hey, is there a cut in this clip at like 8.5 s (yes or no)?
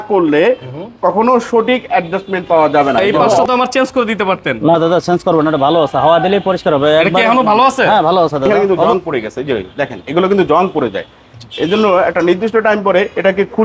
yes